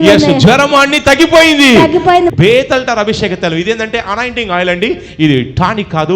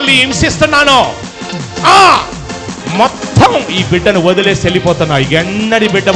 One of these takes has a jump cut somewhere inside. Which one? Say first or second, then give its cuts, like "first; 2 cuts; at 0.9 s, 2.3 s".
first; 1 cut; at 2.3 s